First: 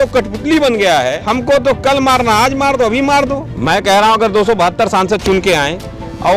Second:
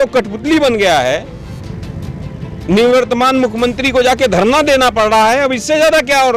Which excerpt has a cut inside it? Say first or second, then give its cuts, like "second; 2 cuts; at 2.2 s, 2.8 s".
first; 2 cuts; at 1.2 s, 3.5 s